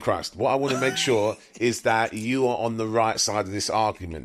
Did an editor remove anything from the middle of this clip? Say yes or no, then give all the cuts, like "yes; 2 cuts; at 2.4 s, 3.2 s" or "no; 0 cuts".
no; 0 cuts